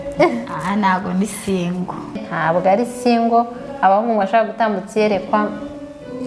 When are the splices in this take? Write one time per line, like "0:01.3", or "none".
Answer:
0:02.3